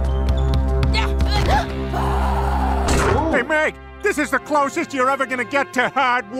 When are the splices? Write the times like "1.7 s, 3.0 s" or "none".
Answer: none